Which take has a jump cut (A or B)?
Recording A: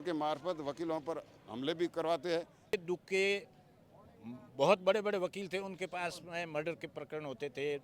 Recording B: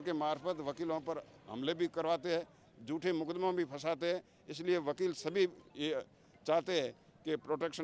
A